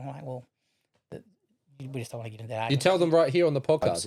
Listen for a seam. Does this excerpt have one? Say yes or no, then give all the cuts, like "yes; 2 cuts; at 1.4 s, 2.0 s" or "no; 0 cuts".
no; 0 cuts